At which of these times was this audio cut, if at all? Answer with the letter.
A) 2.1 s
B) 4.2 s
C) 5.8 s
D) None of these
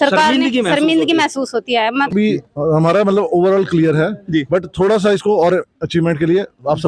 A